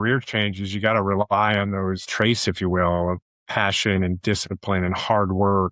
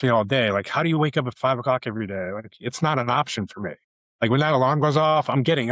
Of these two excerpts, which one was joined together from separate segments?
first; 2 cuts; at 2.0 s, 3.3 s

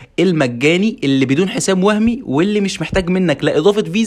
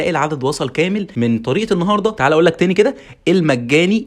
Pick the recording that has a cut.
second; 2 cuts; at 1.1 s, 2.2 s

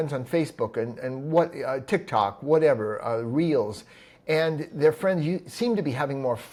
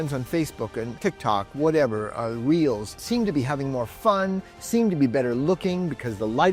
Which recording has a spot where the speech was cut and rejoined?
second; 2 cuts; at 1.0 s, 3.0 s

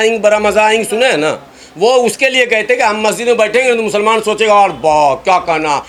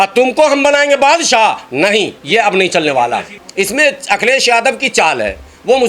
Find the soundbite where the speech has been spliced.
second; 1 cut; at 3.4 s

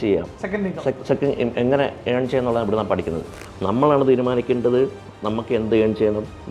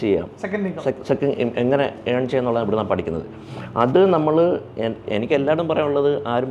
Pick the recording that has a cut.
first; 1 cut; at 3.6 s

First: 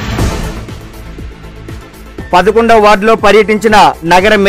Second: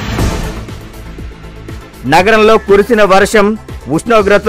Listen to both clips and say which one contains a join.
first; 1 cut; at 2.0 s

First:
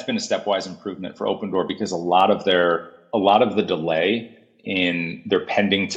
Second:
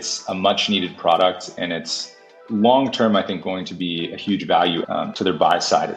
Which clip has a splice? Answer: second; 1 cut; at 4.9 s

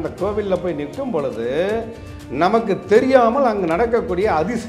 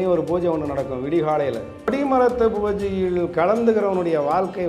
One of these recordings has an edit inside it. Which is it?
second; 1 cut; at 1.9 s

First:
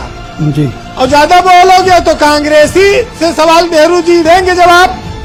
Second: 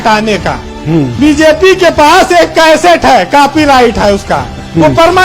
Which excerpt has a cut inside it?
second; 1 cut; at 1.1 s

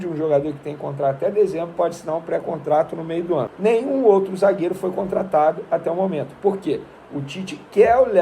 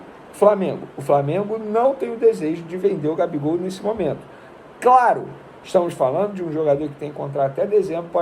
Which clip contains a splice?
first; 1 cut; at 3.5 s

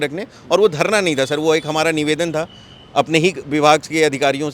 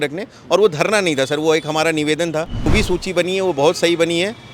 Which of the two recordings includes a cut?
second; 1 cut; at 2.7 s

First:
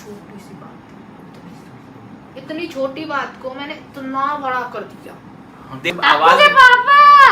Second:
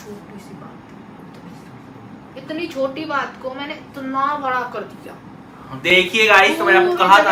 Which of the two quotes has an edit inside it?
first; 1 cut; at 5.9 s

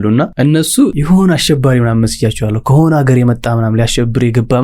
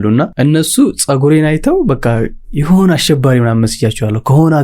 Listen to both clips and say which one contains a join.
first; 1 cut; at 1.0 s

